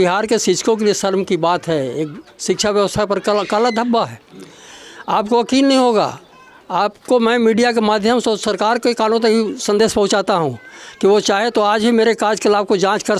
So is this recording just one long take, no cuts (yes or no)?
yes